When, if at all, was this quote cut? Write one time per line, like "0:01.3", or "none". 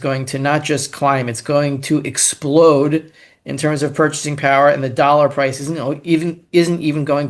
none

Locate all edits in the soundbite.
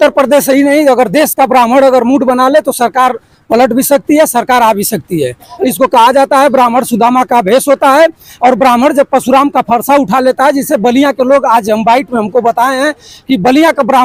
none

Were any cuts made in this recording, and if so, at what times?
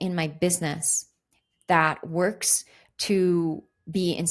none

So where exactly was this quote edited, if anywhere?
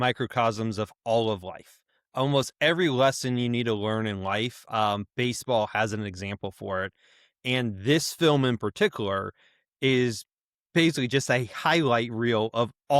none

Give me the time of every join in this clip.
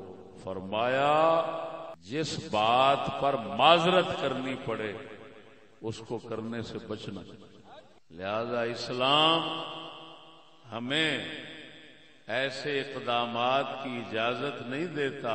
none

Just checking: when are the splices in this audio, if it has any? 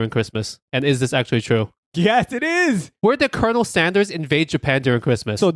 0:02.9

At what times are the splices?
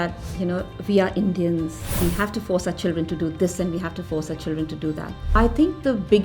0:01.8
0:05.3

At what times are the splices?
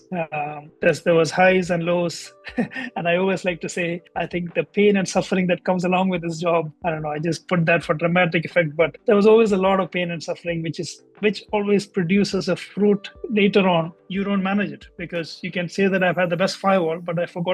0:14.0

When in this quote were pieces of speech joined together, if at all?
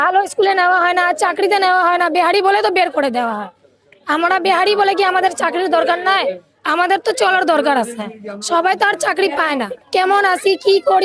none

